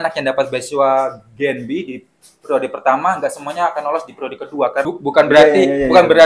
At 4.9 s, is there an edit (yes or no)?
yes